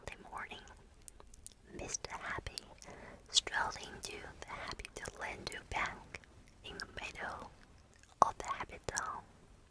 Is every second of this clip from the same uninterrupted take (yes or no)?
yes